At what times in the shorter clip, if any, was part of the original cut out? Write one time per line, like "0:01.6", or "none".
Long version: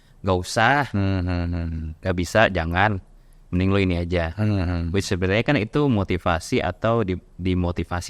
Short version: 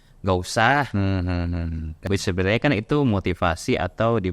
0:02.0